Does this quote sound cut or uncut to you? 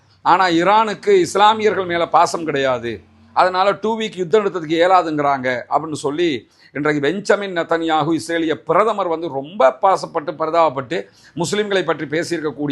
uncut